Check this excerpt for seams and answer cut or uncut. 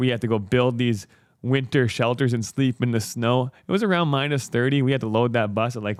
uncut